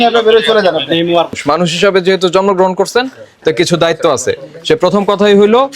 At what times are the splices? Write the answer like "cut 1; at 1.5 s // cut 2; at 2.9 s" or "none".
cut 1; at 1.4 s